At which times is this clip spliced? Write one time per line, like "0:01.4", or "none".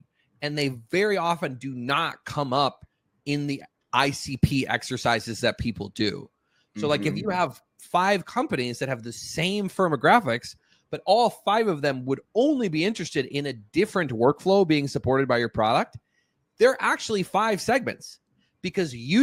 none